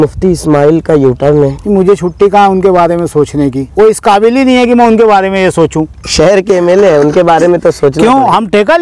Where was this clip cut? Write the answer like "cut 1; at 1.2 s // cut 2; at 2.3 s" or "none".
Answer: cut 1; at 1.6 s // cut 2; at 3.6 s // cut 3; at 6.0 s